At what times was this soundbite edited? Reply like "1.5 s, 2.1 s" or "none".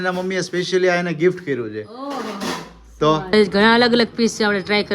3.3 s